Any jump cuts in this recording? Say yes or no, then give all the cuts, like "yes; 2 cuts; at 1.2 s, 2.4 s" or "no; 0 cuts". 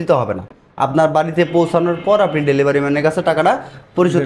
no; 0 cuts